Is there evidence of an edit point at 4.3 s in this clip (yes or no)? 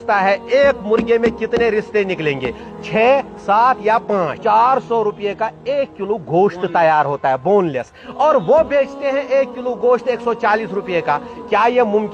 yes